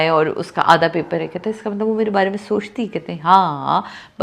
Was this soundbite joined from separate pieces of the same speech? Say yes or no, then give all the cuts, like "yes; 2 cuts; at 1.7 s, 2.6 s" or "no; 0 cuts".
no; 0 cuts